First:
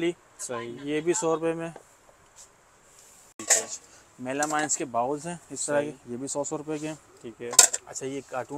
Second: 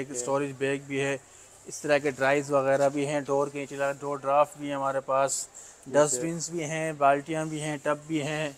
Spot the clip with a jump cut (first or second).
first